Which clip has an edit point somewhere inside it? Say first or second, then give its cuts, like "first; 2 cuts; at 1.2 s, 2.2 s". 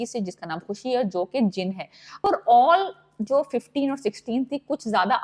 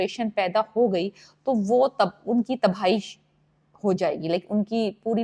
first; 1 cut; at 2.2 s